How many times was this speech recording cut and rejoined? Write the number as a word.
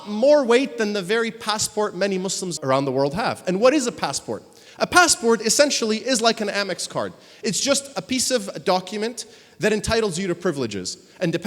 one